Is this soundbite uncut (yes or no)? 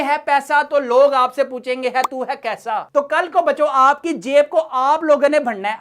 yes